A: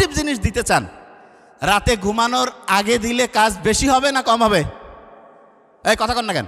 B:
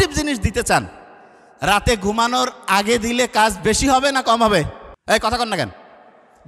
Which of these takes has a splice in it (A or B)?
B